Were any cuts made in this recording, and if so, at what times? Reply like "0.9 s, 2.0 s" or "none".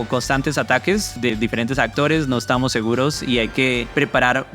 1.3 s